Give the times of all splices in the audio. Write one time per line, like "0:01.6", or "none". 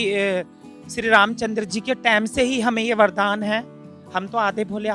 none